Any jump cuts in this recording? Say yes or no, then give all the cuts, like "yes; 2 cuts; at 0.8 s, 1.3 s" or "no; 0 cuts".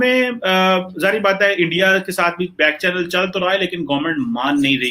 no; 0 cuts